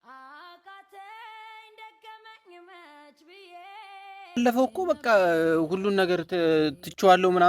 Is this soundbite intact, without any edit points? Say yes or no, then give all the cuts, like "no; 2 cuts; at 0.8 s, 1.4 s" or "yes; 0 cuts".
no; 1 cut; at 4.4 s